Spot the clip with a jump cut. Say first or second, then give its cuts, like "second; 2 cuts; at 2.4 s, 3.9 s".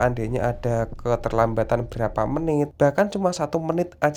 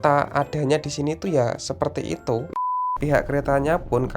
second; 1 cut; at 3.0 s